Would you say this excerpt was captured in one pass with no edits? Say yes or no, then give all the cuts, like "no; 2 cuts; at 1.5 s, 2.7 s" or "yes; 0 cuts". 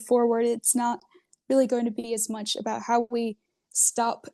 yes; 0 cuts